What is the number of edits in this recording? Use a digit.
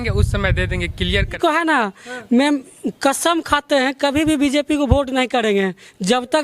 1